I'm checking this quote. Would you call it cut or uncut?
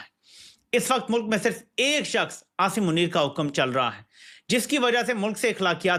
uncut